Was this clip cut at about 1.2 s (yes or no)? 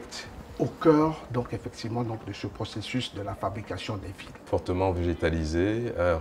no